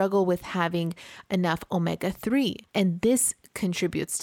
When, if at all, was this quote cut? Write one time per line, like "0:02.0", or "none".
0:02.6